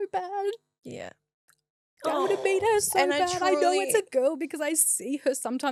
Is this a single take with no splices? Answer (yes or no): yes